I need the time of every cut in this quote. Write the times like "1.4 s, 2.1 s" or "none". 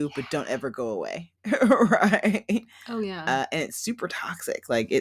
none